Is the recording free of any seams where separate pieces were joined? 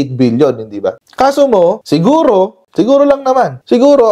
no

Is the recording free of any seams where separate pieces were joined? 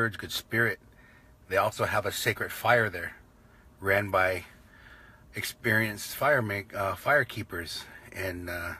no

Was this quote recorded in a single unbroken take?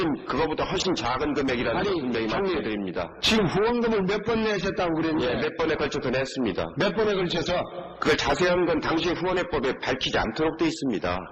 yes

